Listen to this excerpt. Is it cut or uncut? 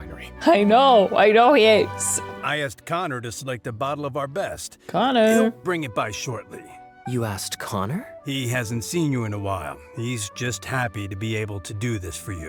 uncut